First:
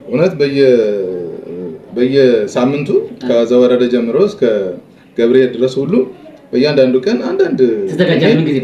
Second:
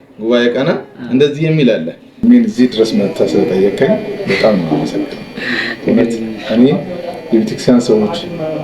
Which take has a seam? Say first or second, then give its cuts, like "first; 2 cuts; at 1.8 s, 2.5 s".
second; 1 cut; at 2.2 s